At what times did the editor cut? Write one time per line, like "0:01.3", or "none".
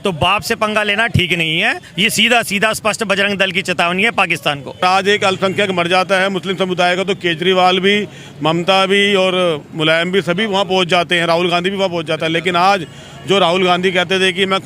0:04.8